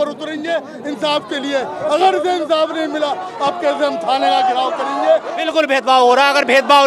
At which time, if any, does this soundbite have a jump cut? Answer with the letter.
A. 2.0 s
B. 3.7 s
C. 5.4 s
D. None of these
C